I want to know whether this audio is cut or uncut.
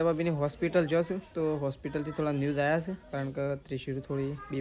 uncut